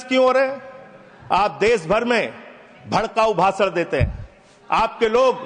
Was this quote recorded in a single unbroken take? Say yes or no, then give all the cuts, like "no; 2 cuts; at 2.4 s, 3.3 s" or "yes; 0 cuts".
yes; 0 cuts